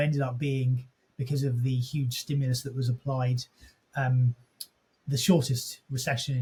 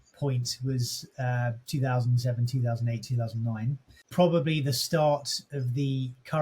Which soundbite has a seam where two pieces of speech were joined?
second; 1 cut; at 3.9 s

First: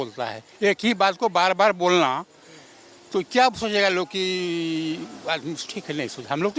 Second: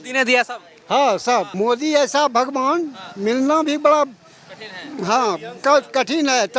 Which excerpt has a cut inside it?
second; 1 cut; at 1.5 s

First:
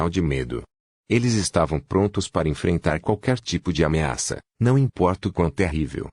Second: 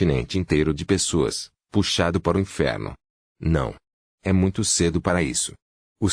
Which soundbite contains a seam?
first; 1 cut; at 4.5 s

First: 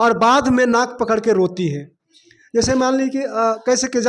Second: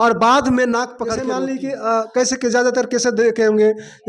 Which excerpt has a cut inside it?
second; 1 cut; at 1.2 s

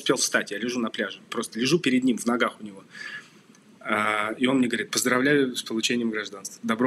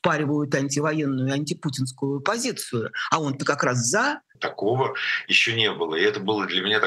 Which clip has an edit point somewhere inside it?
second; 1 cut; at 4.3 s

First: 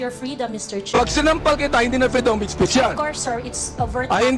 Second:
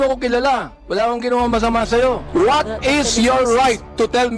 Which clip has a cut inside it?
second; 1 cut; at 2.2 s

